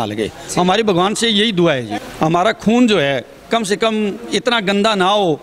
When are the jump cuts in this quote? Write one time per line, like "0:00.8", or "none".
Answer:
0:02.0